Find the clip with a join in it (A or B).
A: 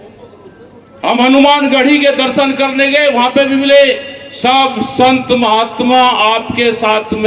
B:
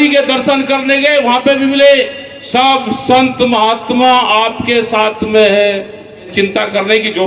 B